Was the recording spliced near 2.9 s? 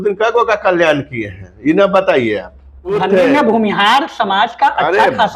yes; 1 cut; at 2.9 s

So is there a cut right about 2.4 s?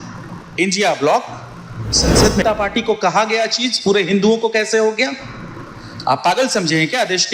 yes; 1 cut; at 2.4 s

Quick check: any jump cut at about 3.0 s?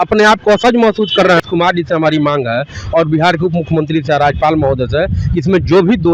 no; 1 cut; at 1.4 s

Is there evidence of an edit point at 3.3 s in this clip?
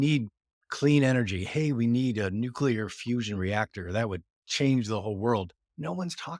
no; 0 cuts

